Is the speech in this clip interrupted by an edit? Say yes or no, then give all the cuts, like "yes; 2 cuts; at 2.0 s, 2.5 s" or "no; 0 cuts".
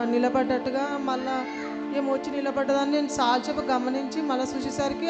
no; 0 cuts